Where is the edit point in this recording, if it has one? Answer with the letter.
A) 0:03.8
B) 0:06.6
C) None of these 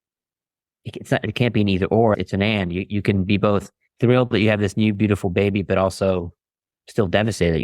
A